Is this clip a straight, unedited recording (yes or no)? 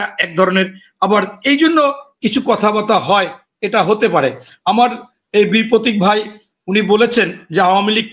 yes